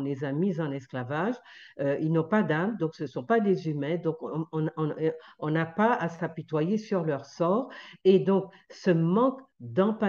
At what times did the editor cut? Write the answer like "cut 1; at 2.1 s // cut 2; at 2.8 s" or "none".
none

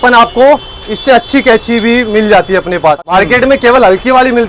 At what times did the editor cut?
cut 1; at 3.0 s

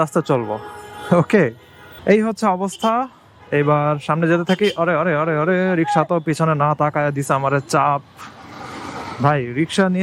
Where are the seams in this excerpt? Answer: cut 1; at 1.9 s

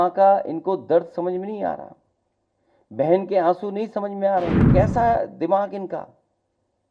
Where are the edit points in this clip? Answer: cut 1; at 4.7 s

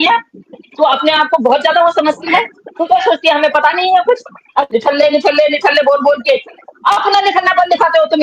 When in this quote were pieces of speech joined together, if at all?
cut 1; at 4.7 s

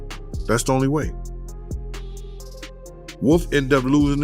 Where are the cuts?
cut 1; at 1.1 s // cut 2; at 2.8 s

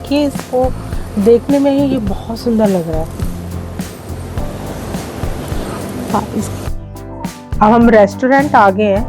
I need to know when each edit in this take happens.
cut 1; at 6.9 s

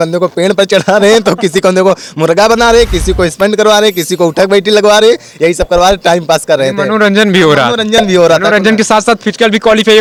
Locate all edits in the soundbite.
none

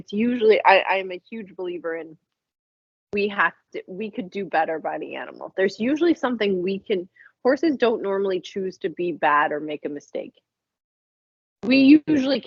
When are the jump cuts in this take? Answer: none

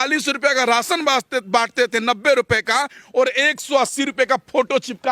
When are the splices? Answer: none

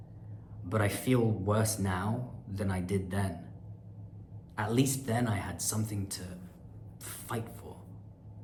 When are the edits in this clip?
none

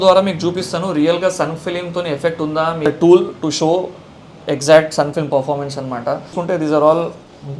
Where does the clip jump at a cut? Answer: cut 1; at 2.9 s // cut 2; at 6.3 s

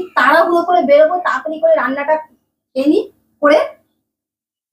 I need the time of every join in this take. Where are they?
none

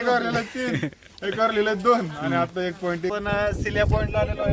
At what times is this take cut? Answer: cut 1; at 3.1 s

